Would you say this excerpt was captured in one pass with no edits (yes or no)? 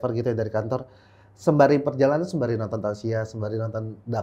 yes